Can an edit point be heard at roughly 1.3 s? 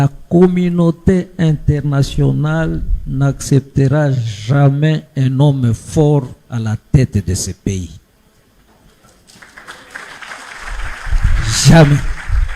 yes; 1 cut; at 1.3 s

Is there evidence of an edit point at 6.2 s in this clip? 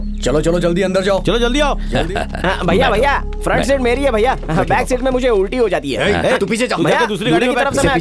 no; 1 cut; at 1.9 s

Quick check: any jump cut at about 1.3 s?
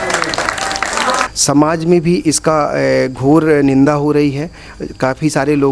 yes; 1 cut; at 1.3 s

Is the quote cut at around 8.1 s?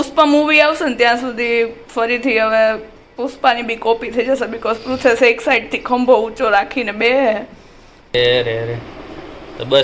yes; 1 cut; at 8.1 s

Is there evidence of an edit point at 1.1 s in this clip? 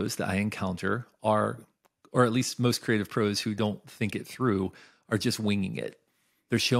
no; 0 cuts

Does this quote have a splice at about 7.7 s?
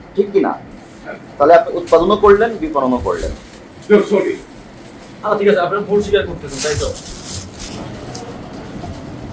yes; 1 cut; at 7.7 s

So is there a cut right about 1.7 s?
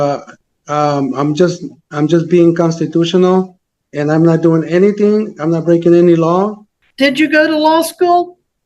no; 1 cut; at 6.6 s

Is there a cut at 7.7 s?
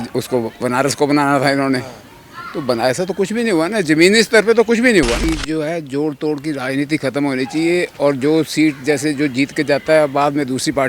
no; 1 cut; at 5.2 s

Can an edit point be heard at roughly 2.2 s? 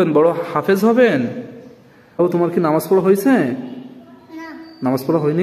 yes; 1 cut; at 2.2 s

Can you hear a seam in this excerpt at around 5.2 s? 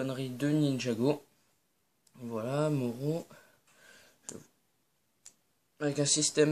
yes; 1 cut; at 5.2 s

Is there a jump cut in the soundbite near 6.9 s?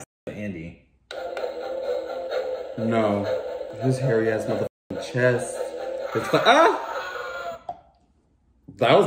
no; 0 cuts

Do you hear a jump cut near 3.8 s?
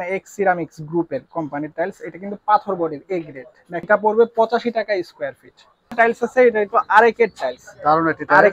yes; 2 cuts; at 3.8 s, 5.9 s

